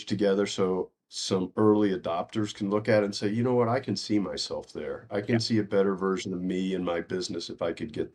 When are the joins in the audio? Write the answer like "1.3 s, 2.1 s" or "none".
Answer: none

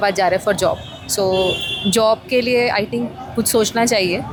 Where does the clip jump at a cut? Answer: none

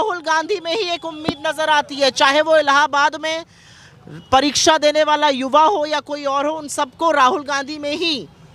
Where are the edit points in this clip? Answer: none

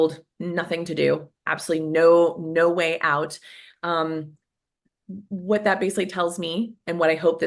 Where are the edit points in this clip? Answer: none

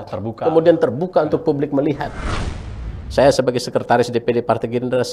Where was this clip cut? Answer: 2.6 s

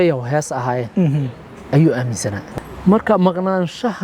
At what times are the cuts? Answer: 2.5 s

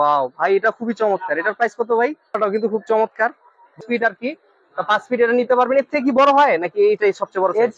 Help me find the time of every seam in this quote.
2.4 s, 3.8 s

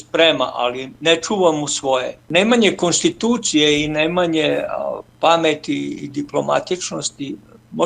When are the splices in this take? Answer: 2.3 s

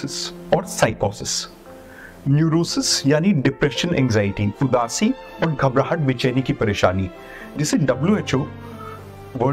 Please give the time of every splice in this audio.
none

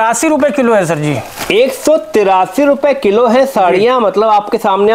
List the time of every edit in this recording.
none

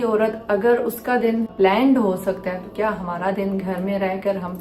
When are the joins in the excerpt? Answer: none

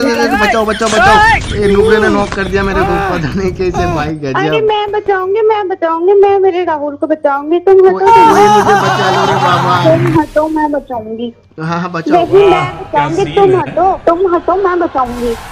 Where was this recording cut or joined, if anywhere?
none

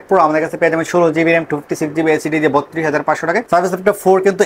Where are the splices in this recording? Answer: 3.5 s

